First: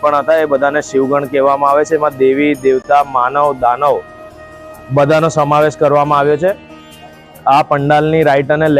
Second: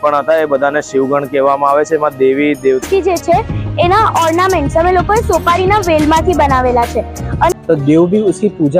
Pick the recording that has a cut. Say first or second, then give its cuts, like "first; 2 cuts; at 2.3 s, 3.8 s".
second; 2 cuts; at 2.8 s, 7.5 s